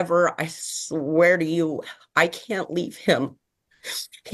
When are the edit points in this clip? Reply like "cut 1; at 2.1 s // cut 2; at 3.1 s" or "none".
none